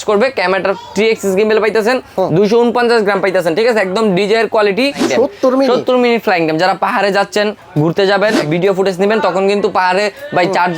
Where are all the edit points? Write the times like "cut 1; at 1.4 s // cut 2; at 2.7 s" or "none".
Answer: cut 1; at 5.0 s